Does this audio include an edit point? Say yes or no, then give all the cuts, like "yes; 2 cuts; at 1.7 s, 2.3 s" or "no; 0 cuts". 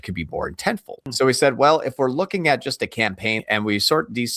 yes; 2 cuts; at 1.1 s, 3.4 s